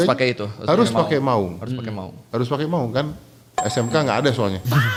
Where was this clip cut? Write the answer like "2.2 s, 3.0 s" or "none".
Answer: none